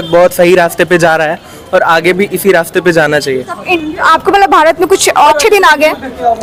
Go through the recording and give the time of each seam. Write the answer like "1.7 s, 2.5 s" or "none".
none